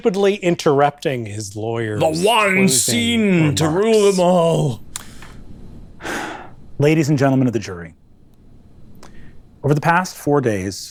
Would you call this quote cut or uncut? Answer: uncut